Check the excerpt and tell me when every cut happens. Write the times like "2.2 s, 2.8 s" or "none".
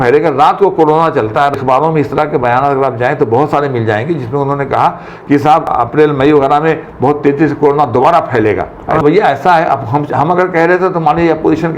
1.6 s, 5.7 s, 9.0 s